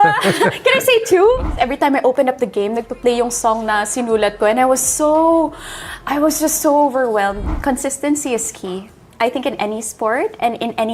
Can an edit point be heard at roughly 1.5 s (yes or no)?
yes